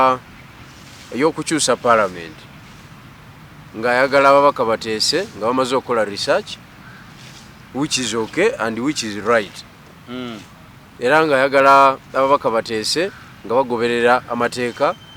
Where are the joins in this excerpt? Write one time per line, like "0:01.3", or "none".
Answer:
none